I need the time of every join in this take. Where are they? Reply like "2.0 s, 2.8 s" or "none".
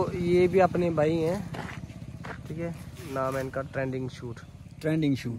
none